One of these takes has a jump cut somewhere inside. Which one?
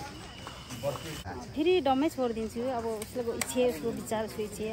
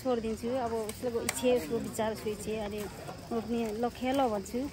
first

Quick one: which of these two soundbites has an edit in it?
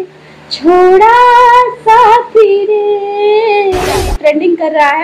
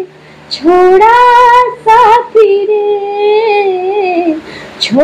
first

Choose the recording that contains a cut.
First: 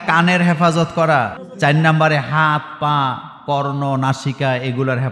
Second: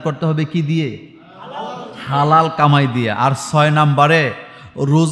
first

